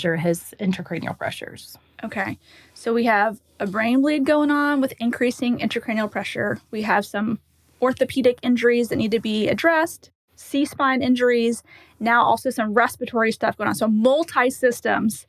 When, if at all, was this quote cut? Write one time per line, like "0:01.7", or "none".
none